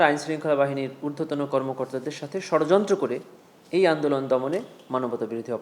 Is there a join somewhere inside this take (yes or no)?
no